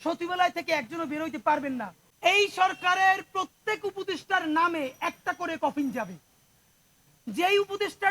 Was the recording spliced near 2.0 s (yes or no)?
yes